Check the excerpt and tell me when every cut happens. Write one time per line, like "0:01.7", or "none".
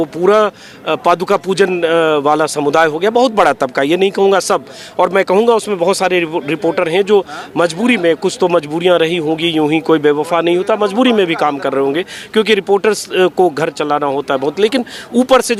none